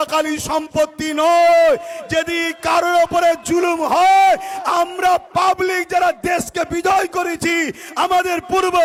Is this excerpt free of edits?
yes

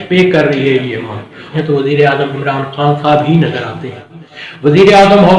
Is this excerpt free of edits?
no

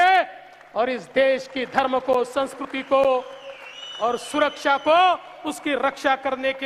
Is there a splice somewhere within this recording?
no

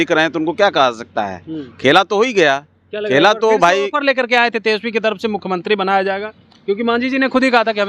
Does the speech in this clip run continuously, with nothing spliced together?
yes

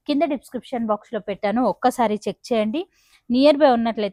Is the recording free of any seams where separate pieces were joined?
yes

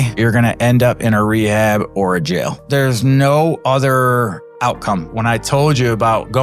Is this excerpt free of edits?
no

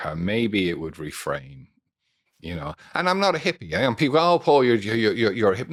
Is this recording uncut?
yes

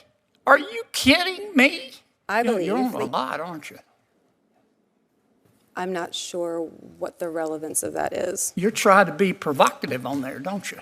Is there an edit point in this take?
yes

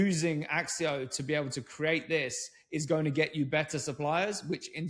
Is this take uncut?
yes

